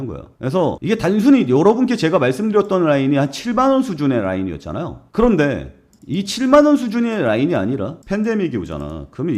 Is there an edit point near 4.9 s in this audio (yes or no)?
no